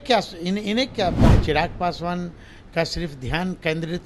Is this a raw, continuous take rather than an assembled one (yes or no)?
no